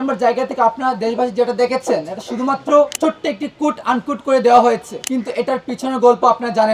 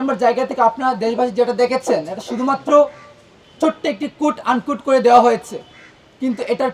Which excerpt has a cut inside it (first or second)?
first